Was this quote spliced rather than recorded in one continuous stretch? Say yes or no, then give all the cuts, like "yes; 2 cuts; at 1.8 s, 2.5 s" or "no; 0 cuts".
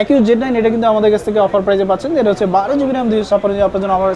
no; 0 cuts